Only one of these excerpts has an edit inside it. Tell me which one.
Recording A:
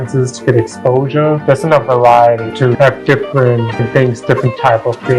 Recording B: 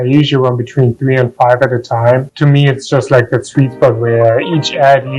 A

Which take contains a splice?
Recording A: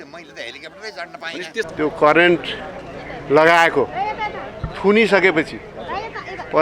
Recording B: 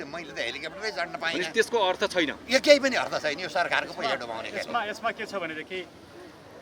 A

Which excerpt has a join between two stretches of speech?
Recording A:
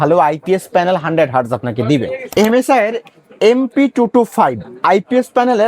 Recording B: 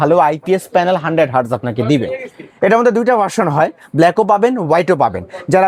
A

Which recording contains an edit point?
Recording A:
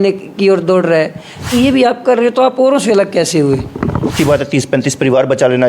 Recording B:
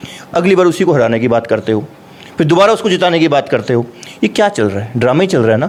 A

